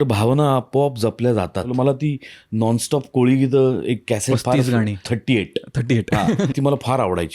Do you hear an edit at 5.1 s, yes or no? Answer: yes